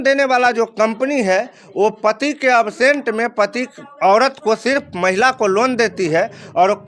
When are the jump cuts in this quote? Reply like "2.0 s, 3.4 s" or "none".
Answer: none